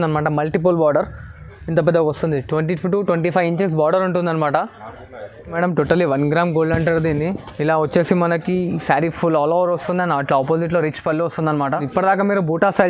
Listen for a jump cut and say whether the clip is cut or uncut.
cut